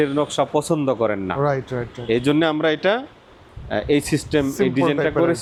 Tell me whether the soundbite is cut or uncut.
uncut